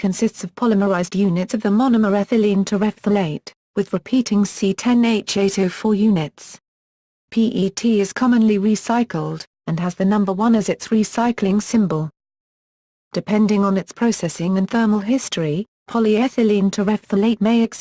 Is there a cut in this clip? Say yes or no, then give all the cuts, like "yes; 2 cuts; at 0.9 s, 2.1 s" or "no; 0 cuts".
yes; 1 cut; at 2.5 s